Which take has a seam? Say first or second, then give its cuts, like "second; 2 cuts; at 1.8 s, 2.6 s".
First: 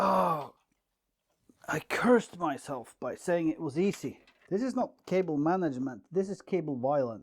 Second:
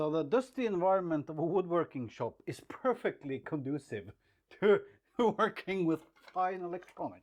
first; 1 cut; at 4.4 s